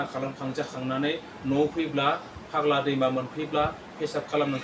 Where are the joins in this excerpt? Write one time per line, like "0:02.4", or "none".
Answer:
none